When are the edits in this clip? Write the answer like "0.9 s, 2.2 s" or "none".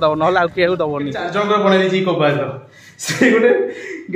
1.2 s